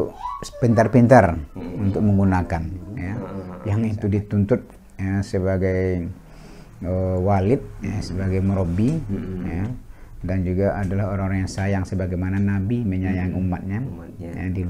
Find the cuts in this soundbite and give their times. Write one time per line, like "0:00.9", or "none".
0:03.3